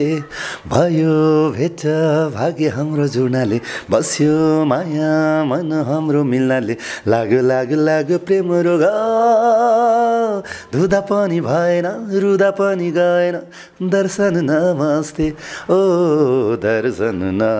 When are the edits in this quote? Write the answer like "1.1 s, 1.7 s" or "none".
none